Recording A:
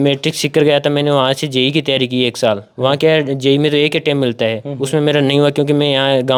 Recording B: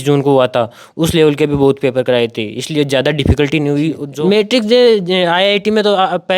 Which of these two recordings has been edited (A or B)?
B